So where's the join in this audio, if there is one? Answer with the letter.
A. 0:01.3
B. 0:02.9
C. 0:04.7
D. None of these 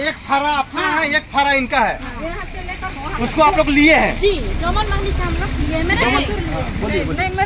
D